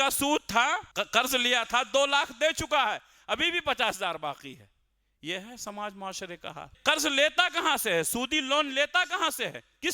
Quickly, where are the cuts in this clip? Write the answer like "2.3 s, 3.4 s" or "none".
0.9 s, 6.7 s